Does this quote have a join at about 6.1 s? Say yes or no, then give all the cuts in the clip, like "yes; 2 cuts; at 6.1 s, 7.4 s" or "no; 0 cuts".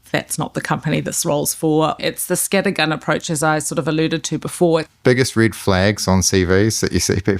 no; 2 cuts; at 2.0 s, 4.9 s